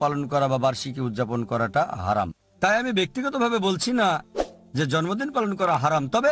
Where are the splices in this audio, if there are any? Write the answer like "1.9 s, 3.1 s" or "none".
none